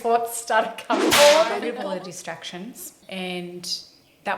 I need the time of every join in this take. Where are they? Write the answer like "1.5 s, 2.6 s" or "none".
1.6 s